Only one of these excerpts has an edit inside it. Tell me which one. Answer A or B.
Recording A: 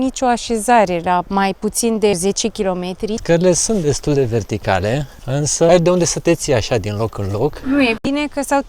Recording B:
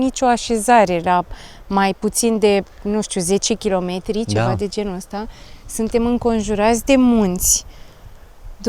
A